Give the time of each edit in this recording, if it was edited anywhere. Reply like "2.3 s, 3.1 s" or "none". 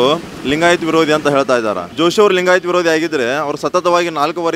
1.8 s